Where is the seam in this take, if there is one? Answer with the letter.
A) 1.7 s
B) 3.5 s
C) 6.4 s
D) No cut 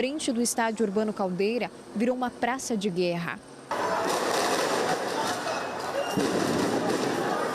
B